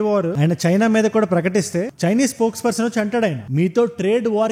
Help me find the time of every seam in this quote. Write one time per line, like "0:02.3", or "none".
0:03.4

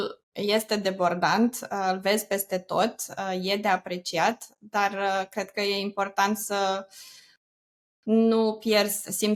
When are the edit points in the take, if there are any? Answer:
none

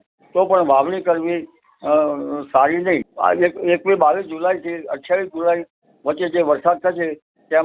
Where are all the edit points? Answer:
0:03.0

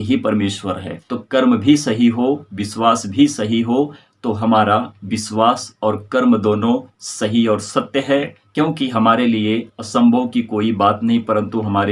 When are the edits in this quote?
0:00.9

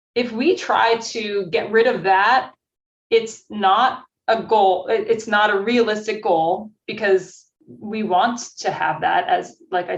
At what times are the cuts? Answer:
none

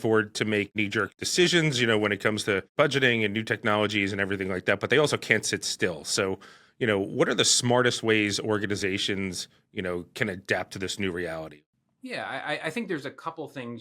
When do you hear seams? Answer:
0:00.9
0:11.6

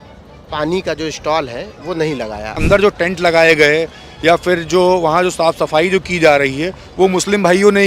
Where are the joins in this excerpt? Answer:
0:02.6

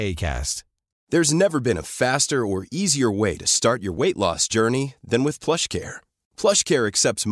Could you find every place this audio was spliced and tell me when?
0:00.9

